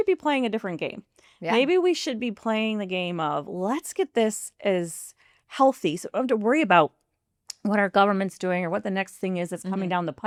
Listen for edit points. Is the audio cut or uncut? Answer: uncut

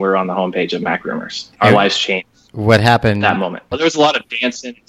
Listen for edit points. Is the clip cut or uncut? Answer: cut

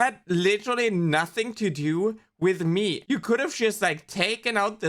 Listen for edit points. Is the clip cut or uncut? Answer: cut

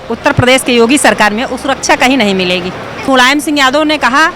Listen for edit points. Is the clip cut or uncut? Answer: cut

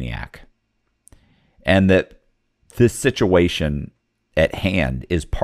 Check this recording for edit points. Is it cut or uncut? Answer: uncut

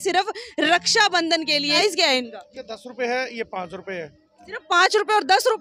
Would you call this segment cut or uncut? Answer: cut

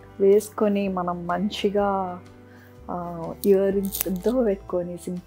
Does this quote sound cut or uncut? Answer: uncut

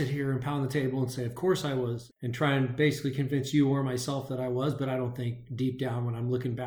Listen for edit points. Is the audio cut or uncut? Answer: uncut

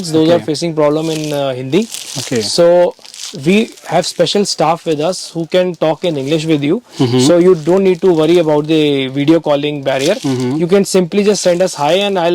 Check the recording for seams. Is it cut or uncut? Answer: uncut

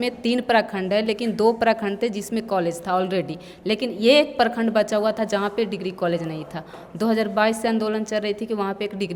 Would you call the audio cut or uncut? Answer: uncut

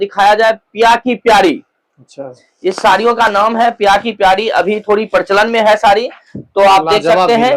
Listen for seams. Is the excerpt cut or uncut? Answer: uncut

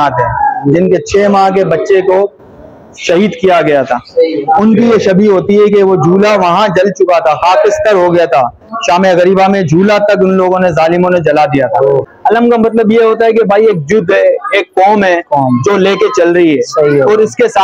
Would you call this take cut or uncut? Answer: cut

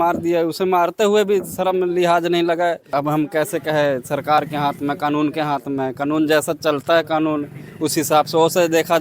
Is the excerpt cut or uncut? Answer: cut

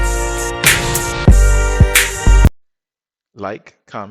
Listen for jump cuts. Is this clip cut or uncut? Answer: cut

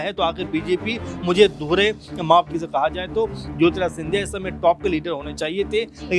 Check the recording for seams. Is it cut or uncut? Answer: cut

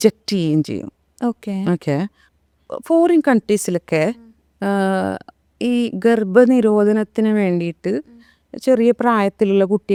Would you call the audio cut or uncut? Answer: uncut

